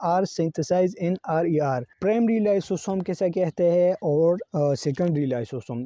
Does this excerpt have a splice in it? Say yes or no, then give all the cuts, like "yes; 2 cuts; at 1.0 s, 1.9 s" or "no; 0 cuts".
yes; 1 cut; at 1.9 s